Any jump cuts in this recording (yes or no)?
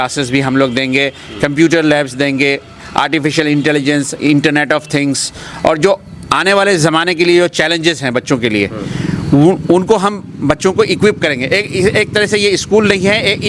no